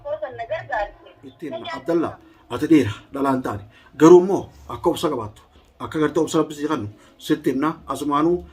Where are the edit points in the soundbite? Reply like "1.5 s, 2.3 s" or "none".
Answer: 1.5 s